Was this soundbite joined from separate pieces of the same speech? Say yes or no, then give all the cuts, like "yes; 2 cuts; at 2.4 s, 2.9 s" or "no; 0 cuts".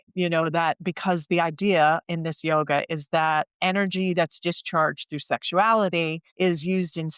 yes; 1 cut; at 6.2 s